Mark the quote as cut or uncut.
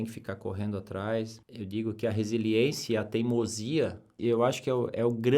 cut